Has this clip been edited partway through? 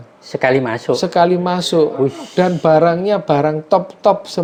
no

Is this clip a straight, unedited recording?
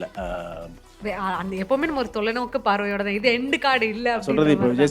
no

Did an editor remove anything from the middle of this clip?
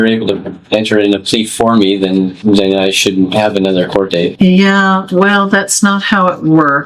no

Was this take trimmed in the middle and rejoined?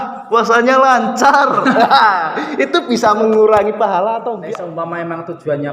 yes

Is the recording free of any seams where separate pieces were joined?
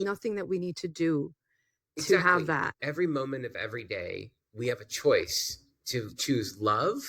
no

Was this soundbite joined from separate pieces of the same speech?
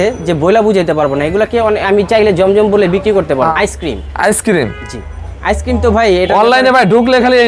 yes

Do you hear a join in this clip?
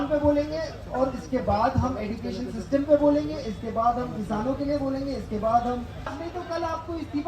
yes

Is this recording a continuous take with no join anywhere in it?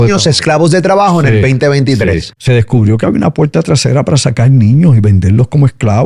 no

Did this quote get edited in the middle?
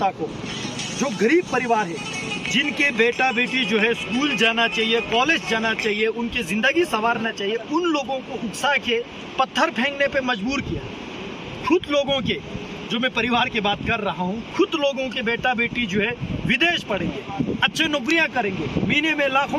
no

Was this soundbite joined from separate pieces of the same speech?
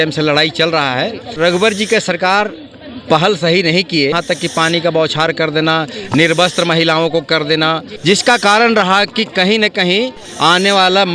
yes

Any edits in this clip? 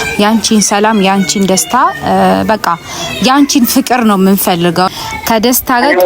yes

